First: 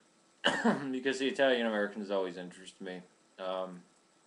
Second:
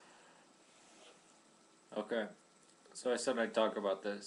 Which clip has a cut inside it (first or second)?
first